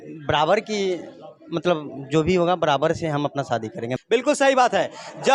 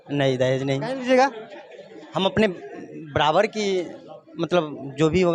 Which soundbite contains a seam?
first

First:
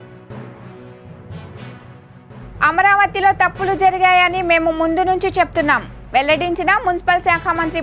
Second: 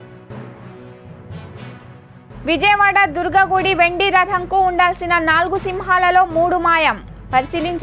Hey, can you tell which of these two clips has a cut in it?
second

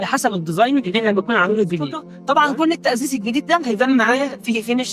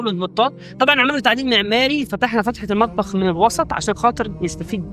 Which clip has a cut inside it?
first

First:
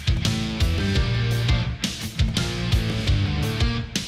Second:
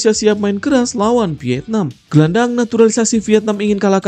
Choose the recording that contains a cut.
second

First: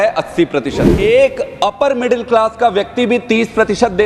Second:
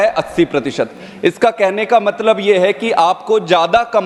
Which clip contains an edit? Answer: first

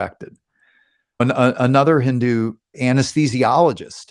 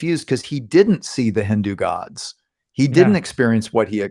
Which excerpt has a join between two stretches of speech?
first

